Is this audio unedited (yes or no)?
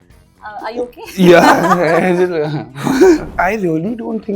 no